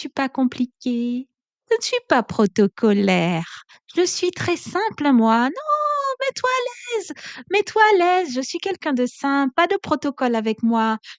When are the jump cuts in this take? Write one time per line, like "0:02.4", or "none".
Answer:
none